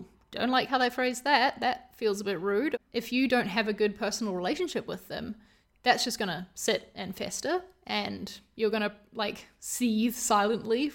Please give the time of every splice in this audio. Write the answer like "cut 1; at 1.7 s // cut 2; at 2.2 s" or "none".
cut 1; at 2.8 s